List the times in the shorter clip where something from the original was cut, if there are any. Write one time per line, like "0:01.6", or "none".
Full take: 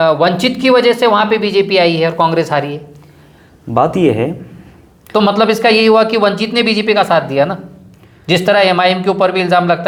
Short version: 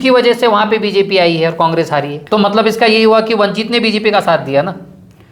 0:02.2